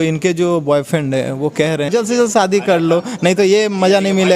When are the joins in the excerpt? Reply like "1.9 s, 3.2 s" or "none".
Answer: 1.9 s